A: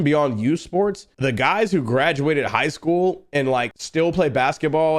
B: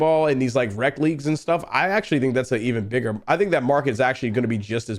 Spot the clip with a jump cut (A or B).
A